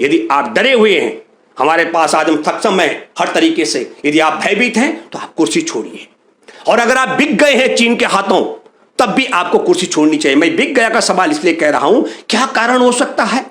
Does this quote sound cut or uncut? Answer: uncut